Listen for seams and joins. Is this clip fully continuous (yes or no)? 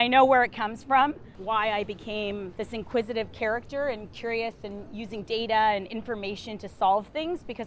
no